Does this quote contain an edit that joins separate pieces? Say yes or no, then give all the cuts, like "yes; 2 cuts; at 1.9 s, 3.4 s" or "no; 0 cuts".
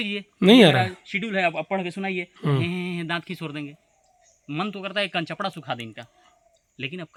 no; 0 cuts